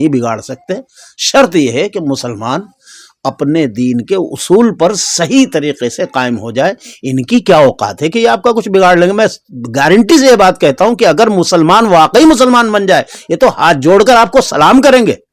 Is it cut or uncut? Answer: uncut